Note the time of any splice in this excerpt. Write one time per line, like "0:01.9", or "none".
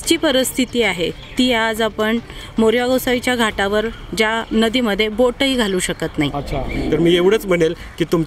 0:06.7